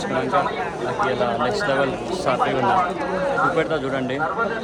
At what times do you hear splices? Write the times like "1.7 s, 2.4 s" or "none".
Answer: none